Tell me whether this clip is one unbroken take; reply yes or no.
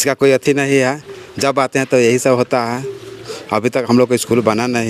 yes